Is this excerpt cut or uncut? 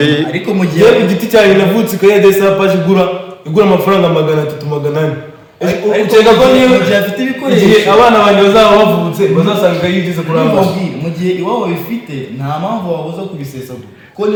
uncut